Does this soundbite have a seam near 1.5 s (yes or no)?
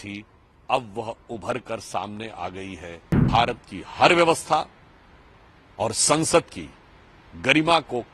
no